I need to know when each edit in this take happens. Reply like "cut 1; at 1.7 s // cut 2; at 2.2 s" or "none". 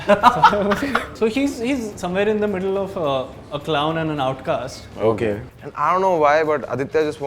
cut 1; at 1.1 s // cut 2; at 5.5 s